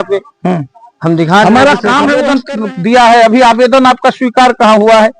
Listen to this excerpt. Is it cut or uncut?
cut